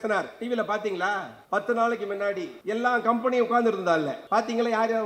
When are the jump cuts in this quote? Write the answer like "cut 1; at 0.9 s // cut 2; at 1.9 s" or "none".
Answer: cut 1; at 1.3 s // cut 2; at 2.5 s // cut 3; at 4.2 s